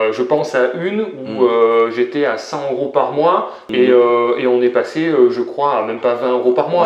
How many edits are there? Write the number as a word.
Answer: one